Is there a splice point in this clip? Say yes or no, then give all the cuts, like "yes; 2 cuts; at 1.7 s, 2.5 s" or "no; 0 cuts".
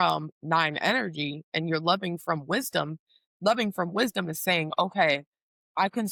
no; 0 cuts